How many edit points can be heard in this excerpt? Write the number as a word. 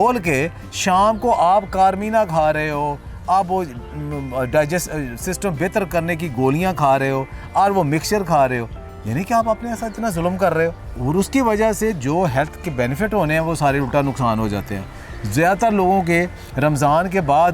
one